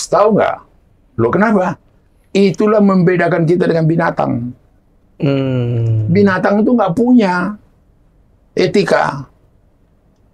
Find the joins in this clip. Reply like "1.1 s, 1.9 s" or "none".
none